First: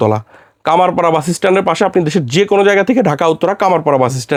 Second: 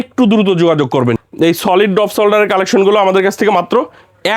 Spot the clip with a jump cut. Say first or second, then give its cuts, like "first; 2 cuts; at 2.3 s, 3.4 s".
second; 1 cut; at 1.2 s